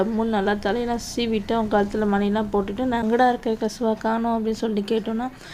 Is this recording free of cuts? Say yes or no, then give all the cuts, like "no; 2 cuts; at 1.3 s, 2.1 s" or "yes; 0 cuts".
no; 1 cut; at 3.0 s